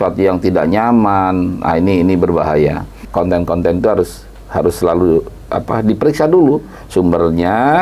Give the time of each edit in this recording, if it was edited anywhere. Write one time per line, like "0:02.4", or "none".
0:03.0